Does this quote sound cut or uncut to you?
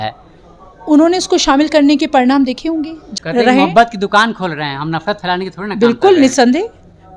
cut